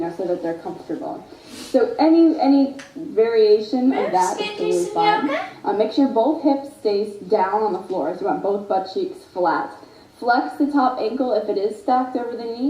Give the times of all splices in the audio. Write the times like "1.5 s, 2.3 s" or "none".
6.9 s